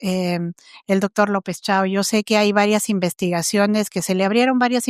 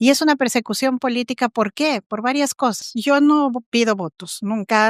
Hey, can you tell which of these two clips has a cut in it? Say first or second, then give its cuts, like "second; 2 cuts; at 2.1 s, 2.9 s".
second; 1 cut; at 2.8 s